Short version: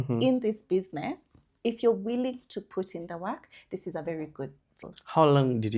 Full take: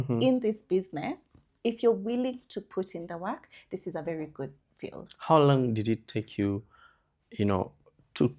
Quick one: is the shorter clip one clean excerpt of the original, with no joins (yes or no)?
no